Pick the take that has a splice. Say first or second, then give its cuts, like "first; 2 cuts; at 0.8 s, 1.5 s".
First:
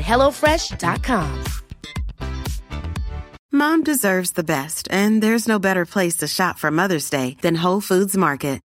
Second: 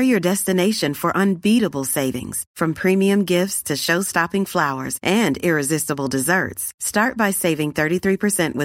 first; 1 cut; at 3.3 s